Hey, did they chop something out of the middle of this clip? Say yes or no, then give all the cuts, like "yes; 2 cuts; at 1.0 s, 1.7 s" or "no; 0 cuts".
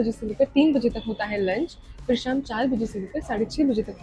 no; 0 cuts